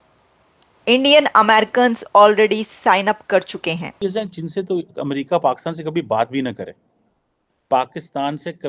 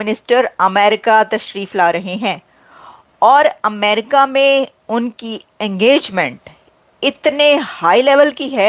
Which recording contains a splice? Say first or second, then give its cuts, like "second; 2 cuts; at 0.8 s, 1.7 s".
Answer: first; 1 cut; at 4.0 s